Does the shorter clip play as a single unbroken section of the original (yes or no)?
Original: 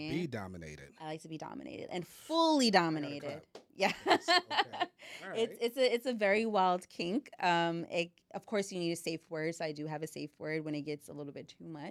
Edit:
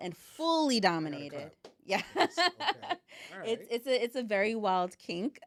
yes